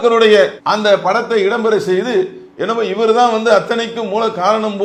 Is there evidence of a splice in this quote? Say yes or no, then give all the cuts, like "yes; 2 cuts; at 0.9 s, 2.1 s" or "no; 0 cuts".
no; 0 cuts